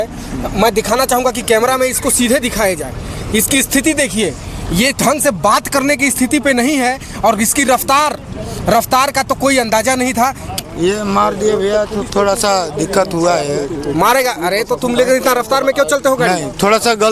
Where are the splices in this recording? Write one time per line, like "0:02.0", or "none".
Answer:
0:10.6